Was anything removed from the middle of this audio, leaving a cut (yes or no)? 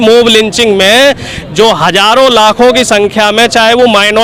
no